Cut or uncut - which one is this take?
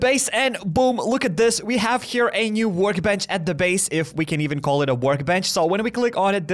uncut